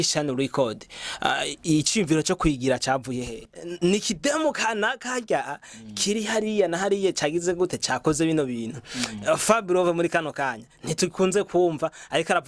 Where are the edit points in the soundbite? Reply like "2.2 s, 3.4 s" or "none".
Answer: 3.6 s